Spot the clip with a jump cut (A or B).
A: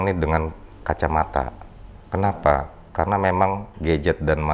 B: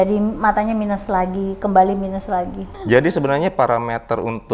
B